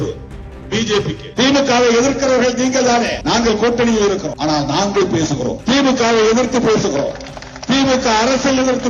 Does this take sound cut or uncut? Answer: cut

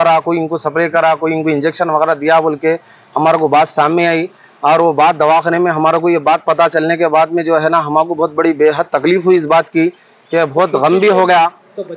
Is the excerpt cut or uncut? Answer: uncut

